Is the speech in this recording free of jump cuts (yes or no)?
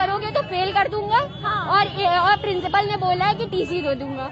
yes